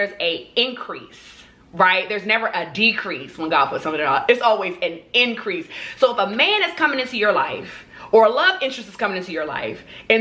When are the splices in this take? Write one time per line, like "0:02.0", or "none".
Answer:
none